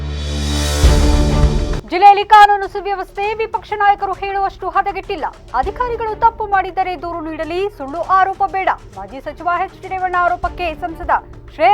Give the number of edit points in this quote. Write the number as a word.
one